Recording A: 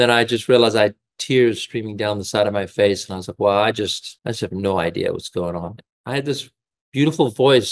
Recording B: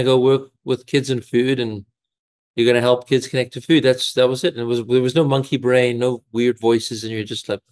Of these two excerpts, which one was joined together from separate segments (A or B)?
A